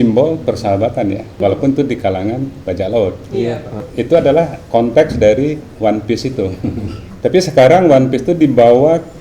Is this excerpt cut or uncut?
cut